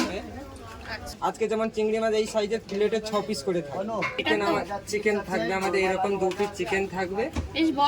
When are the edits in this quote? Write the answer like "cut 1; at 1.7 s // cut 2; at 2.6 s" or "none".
cut 1; at 1.1 s // cut 2; at 4.1 s